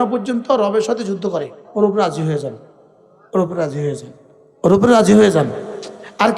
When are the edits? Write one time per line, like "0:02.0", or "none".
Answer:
0:01.6